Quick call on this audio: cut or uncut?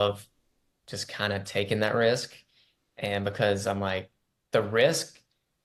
uncut